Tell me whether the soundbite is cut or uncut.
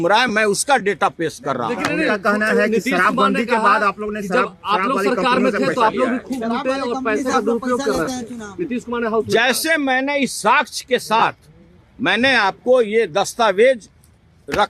uncut